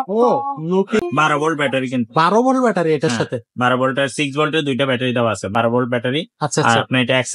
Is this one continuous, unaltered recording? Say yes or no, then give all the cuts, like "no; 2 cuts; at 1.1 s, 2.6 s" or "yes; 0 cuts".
no; 1 cut; at 1.0 s